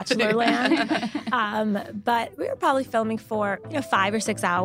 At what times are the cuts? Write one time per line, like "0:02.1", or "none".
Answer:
0:03.6

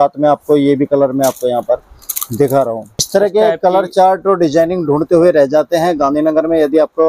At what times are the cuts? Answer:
0:03.0

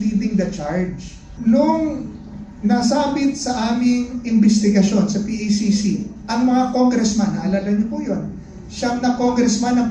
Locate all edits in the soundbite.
0:01.2

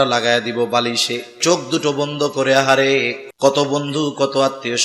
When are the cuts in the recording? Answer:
0:01.4
0:03.2

